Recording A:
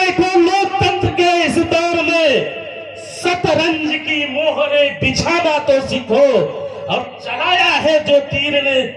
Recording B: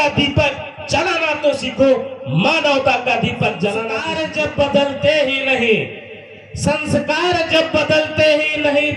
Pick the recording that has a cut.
B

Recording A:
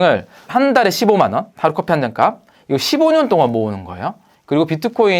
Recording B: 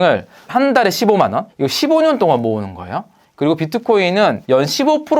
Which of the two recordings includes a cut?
B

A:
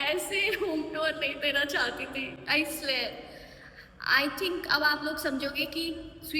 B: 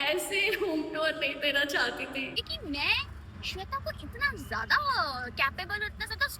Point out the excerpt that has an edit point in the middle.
B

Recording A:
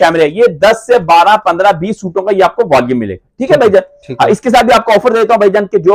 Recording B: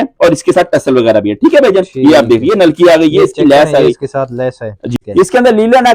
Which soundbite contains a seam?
B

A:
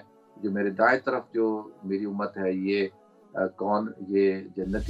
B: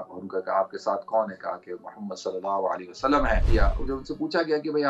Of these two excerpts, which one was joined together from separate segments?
B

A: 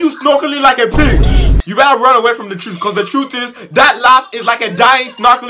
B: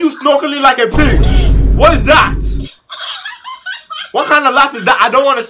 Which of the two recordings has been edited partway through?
A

